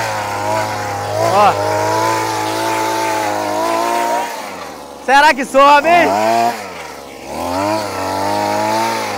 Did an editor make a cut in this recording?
no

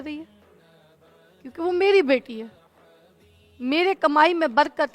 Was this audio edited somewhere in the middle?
no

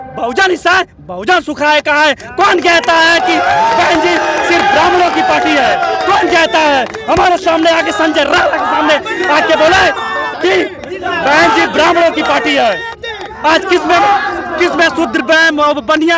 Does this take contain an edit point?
no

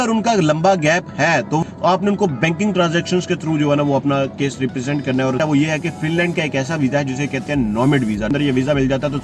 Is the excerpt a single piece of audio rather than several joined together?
no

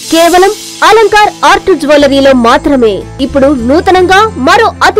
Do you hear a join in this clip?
yes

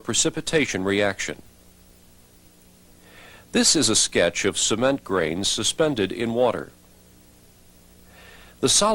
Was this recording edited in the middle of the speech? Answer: yes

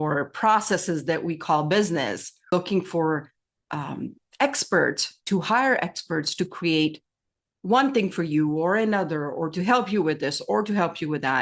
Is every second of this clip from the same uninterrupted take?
no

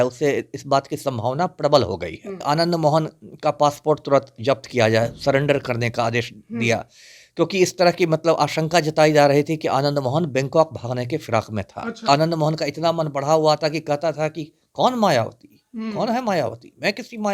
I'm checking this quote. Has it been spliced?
yes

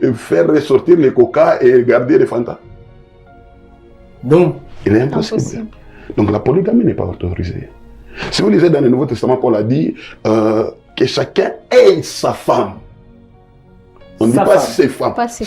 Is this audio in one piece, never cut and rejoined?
yes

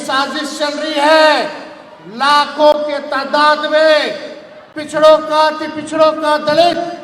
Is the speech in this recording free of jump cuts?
yes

